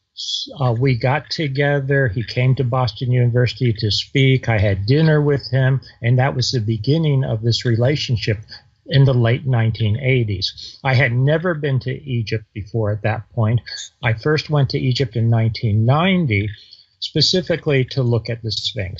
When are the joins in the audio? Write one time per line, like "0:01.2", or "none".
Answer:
none